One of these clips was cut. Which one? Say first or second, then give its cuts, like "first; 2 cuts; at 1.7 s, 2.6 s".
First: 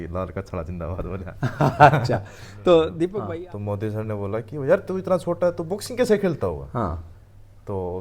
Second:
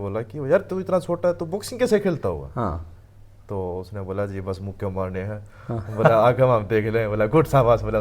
first; 1 cut; at 3.2 s